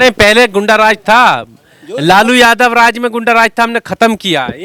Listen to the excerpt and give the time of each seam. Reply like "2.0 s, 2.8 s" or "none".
none

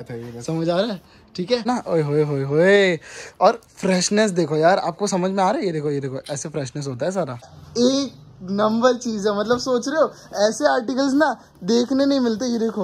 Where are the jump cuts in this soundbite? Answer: 1.7 s, 7.5 s

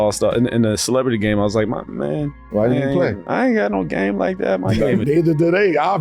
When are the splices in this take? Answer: 3.2 s

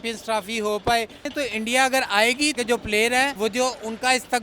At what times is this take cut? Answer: 1.3 s, 2.6 s, 3.3 s

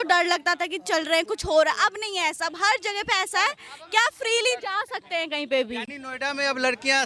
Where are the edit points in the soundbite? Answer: none

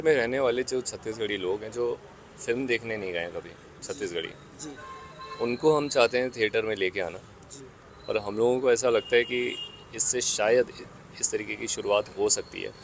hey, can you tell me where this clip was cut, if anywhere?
none

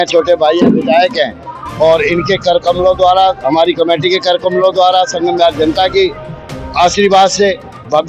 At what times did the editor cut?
none

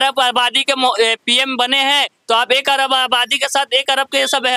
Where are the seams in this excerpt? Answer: none

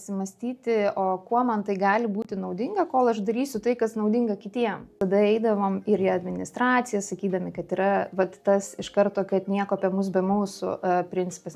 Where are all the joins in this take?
4.9 s

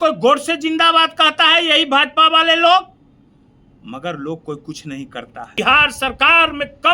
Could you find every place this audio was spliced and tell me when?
5.5 s

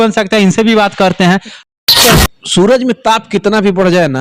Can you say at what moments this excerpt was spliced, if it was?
2.0 s

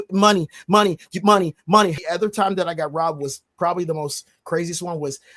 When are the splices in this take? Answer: 2.0 s

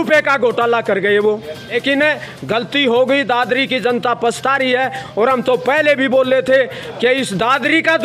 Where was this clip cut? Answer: 1.7 s

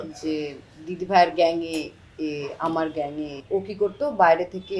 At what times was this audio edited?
3.4 s

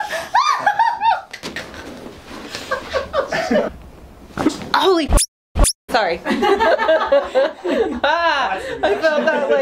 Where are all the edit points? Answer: 3.7 s

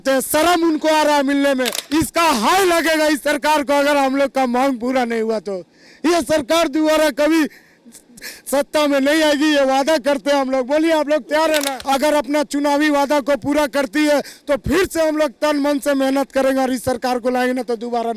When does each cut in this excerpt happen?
1.8 s, 11.7 s

